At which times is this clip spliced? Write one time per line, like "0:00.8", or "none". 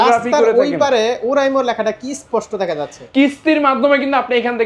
0:02.9